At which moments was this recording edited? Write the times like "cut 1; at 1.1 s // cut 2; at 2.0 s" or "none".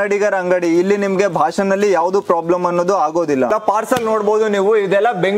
cut 1; at 3.5 s